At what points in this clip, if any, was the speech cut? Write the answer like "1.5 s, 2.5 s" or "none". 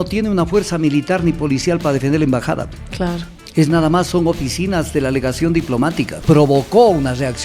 6.2 s